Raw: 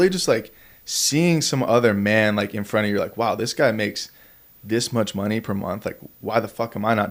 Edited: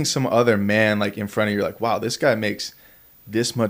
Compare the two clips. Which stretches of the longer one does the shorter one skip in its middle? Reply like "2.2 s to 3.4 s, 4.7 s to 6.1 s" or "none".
none